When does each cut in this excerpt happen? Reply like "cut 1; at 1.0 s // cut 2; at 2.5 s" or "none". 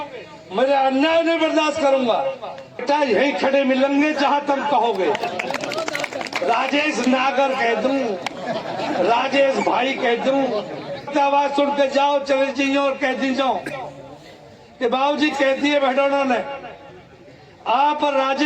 cut 1; at 2.8 s // cut 2; at 11.1 s